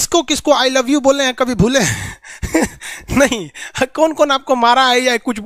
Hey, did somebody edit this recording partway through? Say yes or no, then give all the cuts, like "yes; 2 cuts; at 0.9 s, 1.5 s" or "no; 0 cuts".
no; 0 cuts